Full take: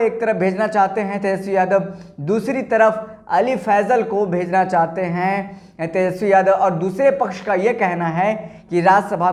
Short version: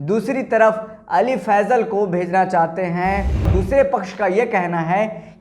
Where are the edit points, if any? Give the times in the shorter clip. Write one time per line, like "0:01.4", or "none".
0:03.5